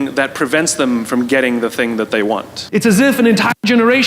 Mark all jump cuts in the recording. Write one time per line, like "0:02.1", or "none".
0:02.5